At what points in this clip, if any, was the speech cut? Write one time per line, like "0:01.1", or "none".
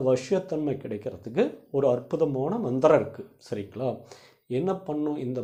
none